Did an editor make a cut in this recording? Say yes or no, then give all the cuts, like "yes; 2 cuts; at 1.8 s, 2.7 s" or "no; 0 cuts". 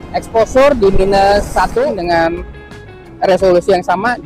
yes; 1 cut; at 2.0 s